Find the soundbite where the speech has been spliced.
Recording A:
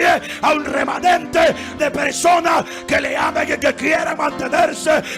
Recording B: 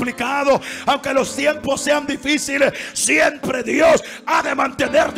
A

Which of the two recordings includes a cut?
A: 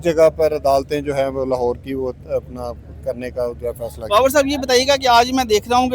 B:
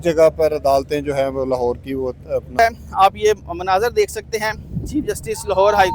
B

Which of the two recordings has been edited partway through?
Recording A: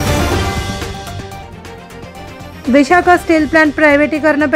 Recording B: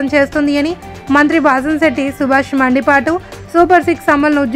A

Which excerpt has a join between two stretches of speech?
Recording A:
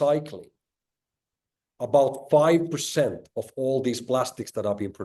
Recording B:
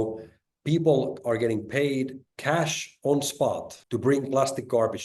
B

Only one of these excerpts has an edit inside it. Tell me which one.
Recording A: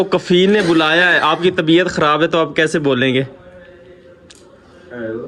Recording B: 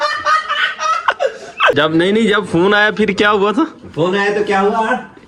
B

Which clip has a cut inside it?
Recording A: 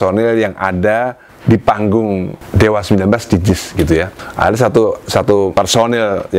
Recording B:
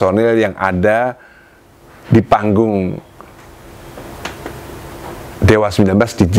A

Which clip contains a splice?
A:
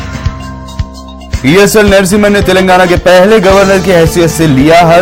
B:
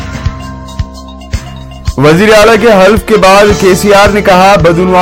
B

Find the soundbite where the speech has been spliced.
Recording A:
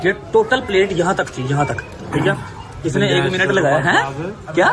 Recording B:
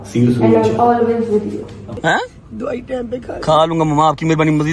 B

